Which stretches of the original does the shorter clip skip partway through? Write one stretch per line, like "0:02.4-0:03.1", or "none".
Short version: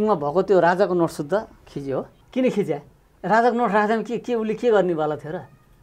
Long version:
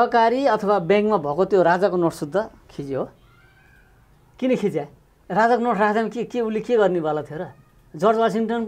0:03.2-0:04.2